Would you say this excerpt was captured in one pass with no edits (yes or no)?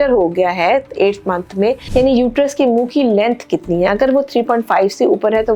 no